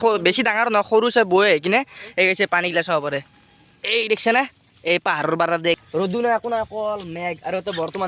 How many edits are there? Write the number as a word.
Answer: one